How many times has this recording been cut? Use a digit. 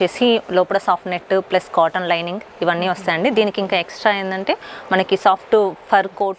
0